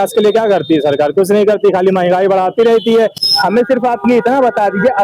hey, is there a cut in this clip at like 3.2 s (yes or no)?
yes